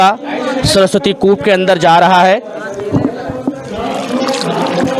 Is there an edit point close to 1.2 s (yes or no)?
no